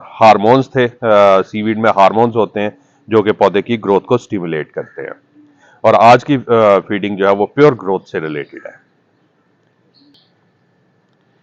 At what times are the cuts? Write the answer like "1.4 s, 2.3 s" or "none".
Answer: none